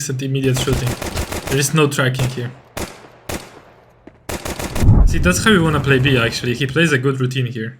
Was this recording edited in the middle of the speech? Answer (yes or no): yes